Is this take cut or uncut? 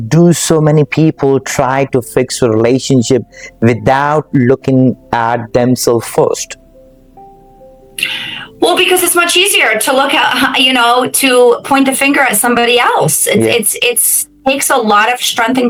uncut